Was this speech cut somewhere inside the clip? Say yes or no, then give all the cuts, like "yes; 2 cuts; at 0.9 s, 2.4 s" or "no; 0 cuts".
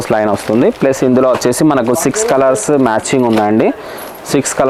no; 0 cuts